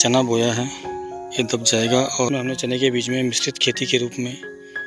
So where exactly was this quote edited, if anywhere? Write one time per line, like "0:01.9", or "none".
0:02.3